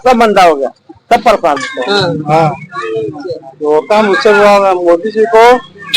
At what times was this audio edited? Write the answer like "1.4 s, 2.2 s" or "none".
1.7 s